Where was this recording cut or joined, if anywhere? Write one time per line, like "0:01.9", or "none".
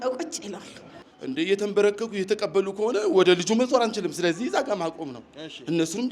0:00.9